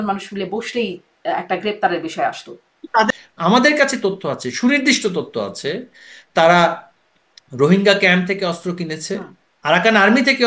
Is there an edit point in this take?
yes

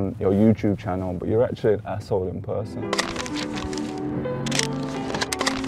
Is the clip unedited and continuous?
yes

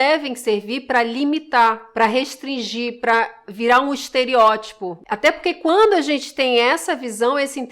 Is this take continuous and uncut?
no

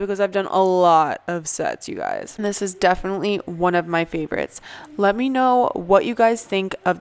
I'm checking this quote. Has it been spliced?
no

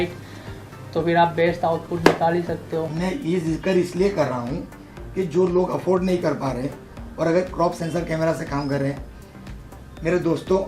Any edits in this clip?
yes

